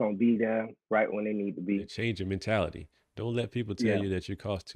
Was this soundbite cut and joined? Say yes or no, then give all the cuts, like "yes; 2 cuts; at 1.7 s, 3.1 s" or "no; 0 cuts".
yes; 1 cut; at 1.9 s